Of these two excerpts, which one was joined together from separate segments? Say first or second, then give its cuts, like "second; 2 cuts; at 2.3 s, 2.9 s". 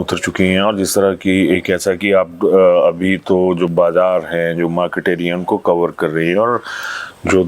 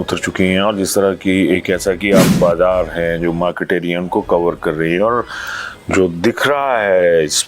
second; 1 cut; at 2.3 s